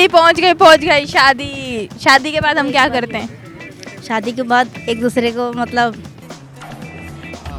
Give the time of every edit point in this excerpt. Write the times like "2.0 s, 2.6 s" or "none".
none